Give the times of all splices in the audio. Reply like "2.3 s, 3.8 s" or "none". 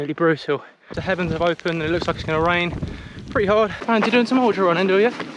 0.9 s, 3.8 s